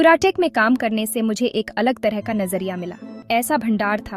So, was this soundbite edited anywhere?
yes; 1 cut; at 3.2 s

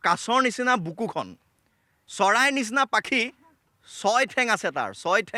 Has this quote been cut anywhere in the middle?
no; 0 cuts

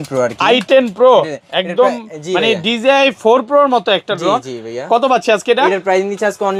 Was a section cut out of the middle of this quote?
no; 0 cuts

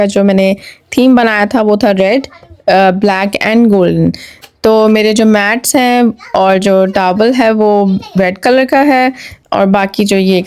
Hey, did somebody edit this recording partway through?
no; 0 cuts

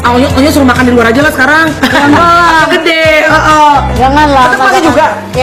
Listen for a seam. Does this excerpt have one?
no; 0 cuts

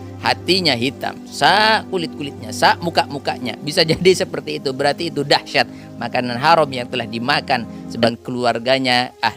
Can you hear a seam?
yes; 1 cut; at 8.1 s

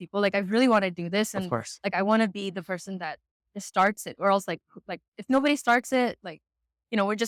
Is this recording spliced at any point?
no; 0 cuts

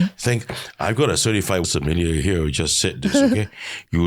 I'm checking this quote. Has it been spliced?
yes; 1 cut; at 1.6 s

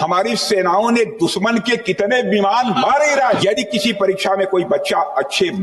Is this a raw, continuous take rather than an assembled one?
no; 1 cut; at 3.4 s

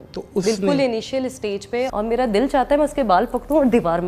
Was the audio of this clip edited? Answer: yes; 1 cut; at 1.9 s

